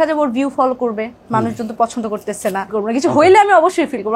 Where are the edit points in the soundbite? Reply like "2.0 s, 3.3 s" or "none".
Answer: 2.7 s

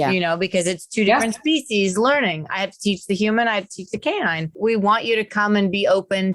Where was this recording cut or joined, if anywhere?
4.5 s

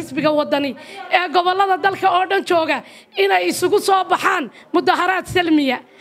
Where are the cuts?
none

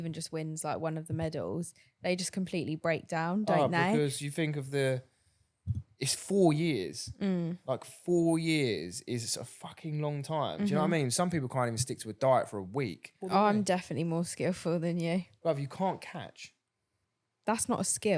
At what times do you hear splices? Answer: 13.2 s

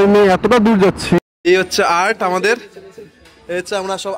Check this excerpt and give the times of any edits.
1.2 s

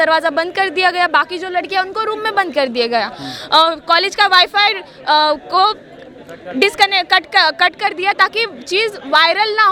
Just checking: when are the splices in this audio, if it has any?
none

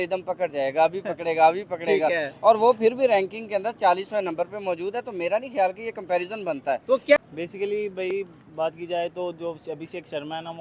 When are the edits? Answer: 7.2 s

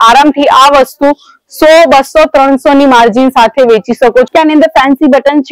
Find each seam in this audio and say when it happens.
4.3 s

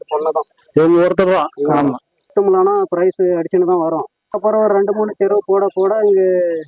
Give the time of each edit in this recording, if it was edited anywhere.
2.2 s, 4.3 s

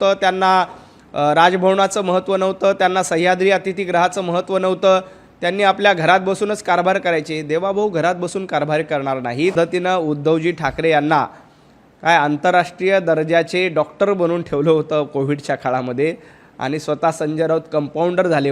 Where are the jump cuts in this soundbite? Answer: 9.5 s

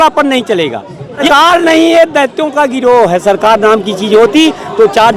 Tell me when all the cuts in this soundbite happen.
1.3 s

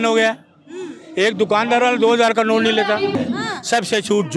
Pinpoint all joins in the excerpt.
3.1 s

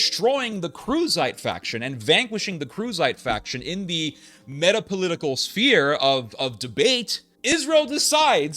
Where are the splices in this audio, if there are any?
7.5 s

